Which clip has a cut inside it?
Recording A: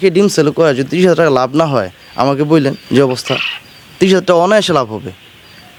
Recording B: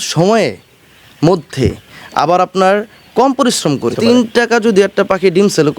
B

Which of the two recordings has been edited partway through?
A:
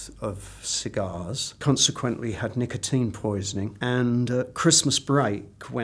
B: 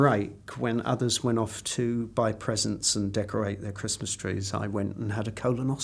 A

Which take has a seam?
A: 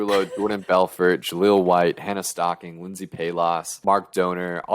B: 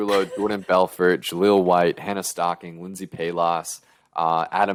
A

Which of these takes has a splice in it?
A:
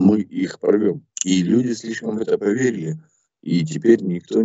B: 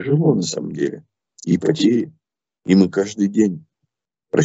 A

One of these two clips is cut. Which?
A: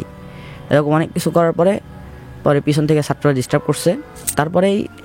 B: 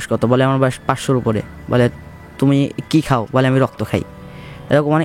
A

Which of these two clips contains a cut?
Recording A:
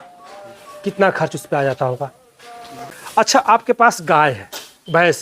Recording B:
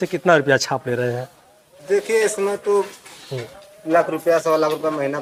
A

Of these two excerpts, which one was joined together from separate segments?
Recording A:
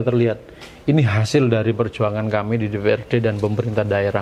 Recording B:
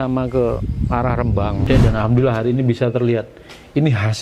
B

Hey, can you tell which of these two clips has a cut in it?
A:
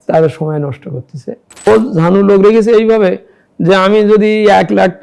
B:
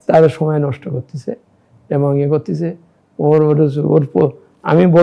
A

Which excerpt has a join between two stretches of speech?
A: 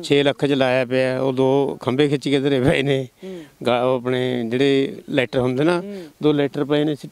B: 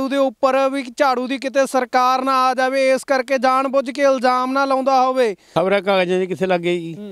B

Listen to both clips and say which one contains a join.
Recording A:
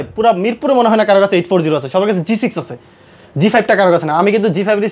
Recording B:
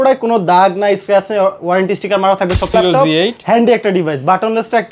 B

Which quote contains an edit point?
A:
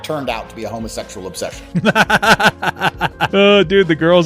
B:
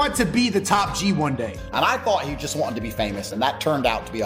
A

